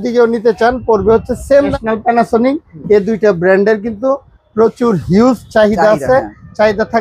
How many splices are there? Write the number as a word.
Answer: one